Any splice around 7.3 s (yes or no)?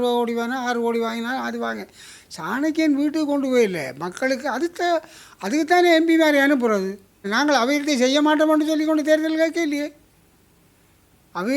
yes